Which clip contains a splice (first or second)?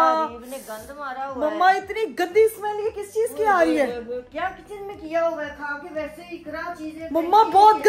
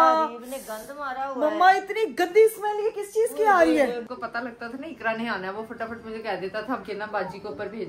second